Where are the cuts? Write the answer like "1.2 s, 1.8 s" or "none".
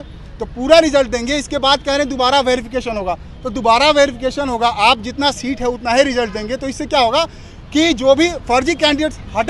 none